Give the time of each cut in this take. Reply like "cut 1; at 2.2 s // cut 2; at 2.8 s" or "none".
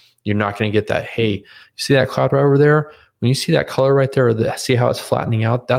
none